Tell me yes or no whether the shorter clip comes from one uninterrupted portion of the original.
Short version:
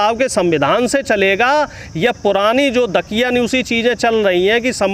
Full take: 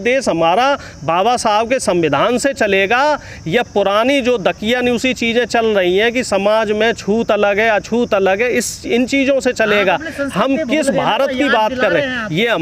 yes